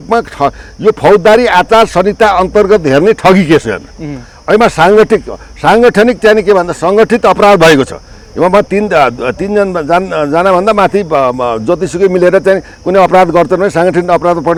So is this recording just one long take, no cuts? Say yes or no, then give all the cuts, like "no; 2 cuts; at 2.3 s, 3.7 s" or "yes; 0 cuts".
yes; 0 cuts